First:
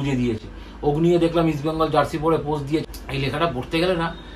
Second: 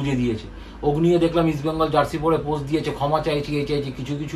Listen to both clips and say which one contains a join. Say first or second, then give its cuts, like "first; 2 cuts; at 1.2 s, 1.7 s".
first; 1 cut; at 2.9 s